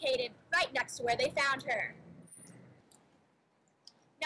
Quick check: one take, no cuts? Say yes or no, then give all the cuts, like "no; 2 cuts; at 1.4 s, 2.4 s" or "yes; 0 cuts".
no; 1 cut; at 2.8 s